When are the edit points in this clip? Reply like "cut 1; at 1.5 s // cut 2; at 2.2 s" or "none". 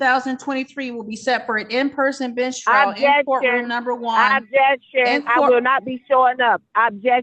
none